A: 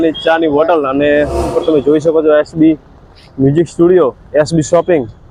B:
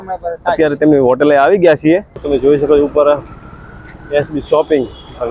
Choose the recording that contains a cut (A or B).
B